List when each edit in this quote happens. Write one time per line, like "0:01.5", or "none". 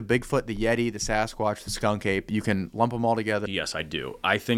0:03.5